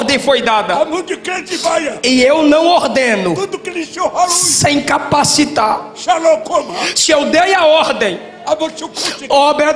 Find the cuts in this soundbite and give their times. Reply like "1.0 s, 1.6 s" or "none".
none